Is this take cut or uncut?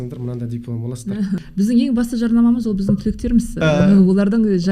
cut